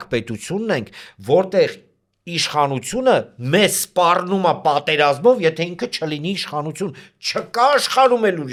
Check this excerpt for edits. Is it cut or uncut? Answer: uncut